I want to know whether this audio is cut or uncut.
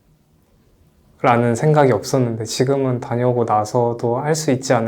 uncut